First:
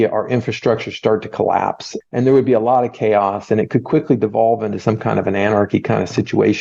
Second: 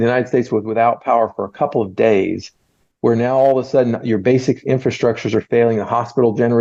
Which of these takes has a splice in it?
first; 1 cut; at 1.9 s

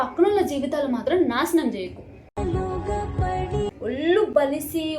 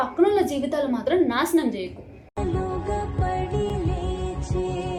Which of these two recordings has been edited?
first; 1 cut; at 3.7 s

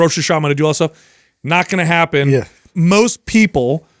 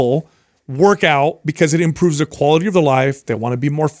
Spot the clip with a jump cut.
first; 1 cut; at 2.6 s

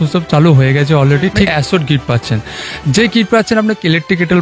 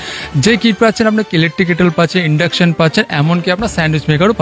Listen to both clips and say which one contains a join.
first; 1 cut; at 1.5 s

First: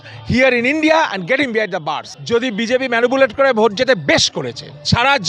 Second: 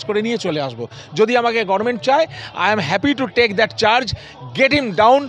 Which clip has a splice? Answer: first; 1 cut; at 2.1 s

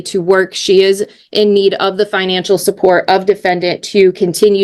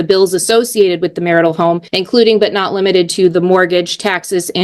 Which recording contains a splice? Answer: second; 1 cut; at 1.9 s

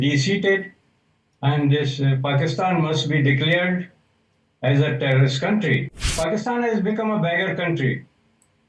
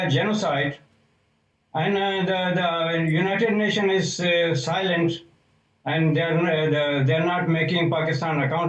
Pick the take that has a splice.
first; 1 cut; at 6.1 s

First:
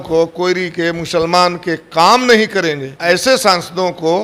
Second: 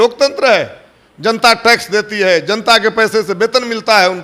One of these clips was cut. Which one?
first; 1 cut; at 3.0 s

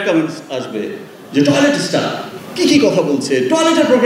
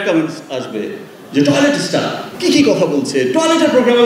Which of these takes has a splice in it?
second; 1 cut; at 2.2 s

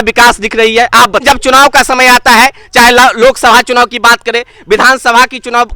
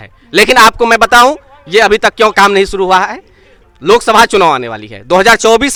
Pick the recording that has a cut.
first; 1 cut; at 1.2 s

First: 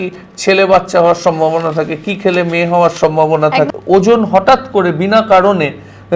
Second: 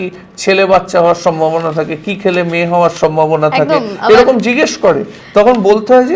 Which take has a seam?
first; 1 cut; at 3.7 s

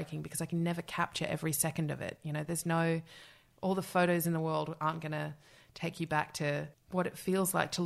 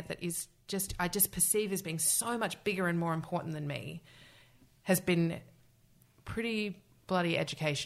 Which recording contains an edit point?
first; 1 cut; at 6.8 s

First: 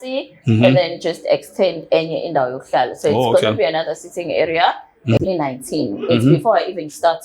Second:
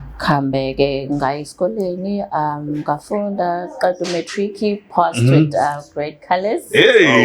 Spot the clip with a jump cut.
first; 1 cut; at 5.2 s

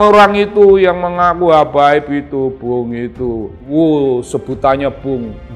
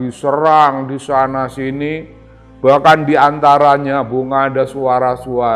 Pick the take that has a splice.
first; 1 cut; at 3.6 s

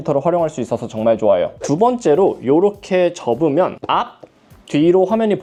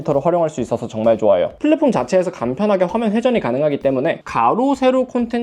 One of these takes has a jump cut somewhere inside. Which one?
second; 1 cut; at 1.6 s

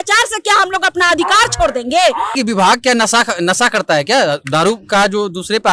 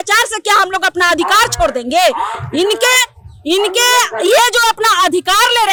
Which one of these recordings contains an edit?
first; 1 cut; at 2.4 s

